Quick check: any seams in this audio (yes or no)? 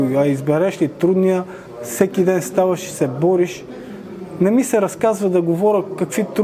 no